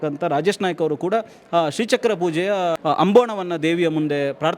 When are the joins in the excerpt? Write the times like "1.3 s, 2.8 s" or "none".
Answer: 2.8 s